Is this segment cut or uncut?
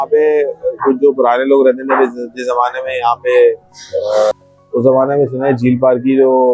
cut